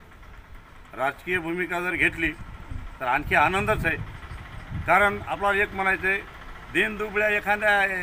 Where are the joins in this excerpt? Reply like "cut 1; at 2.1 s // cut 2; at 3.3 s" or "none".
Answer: none